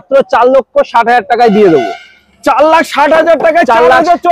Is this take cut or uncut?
uncut